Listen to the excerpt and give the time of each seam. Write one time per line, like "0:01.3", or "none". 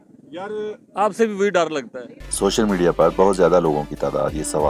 0:02.2